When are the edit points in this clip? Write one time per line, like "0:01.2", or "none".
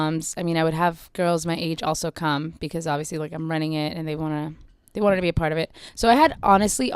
0:05.8